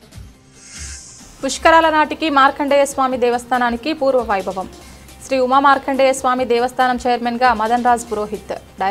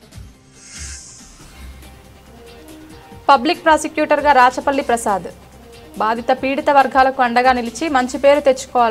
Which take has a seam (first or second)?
second